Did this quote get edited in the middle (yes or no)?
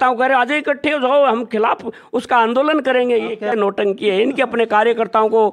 no